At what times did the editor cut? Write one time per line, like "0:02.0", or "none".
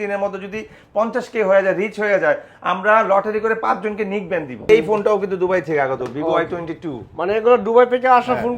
0:04.7